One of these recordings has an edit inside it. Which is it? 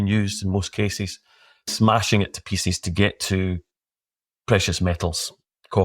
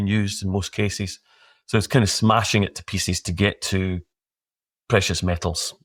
first; 1 cut; at 1.7 s

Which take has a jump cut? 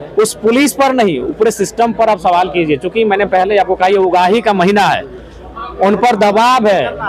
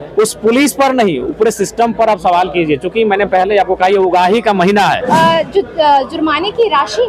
second; 1 cut; at 5.0 s

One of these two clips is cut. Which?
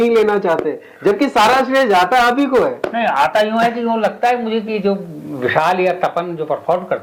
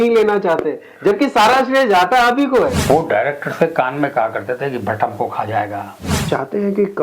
second; 2 cuts; at 2.8 s, 6.2 s

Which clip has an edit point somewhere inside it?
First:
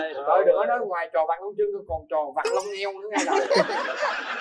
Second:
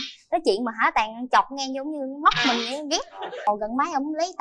second; 1 cut; at 3.4 s

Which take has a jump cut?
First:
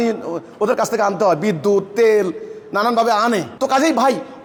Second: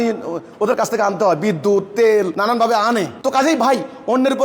second; 1 cut; at 2.3 s

